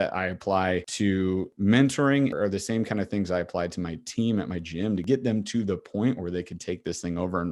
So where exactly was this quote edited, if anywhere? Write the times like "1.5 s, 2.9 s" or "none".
1.4 s, 2.3 s, 5.0 s